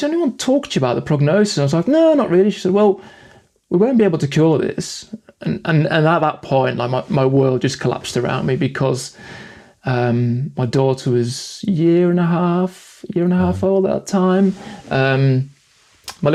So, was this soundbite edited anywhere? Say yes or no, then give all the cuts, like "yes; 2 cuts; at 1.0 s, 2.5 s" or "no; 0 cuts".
no; 0 cuts